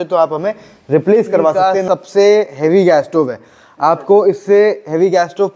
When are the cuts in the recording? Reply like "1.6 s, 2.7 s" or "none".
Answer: 1.6 s